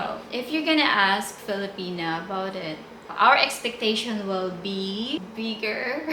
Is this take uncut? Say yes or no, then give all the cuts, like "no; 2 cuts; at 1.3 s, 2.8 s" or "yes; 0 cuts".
yes; 0 cuts